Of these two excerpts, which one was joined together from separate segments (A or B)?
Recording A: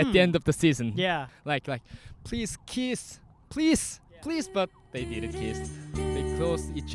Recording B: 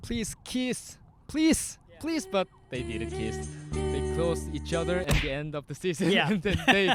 A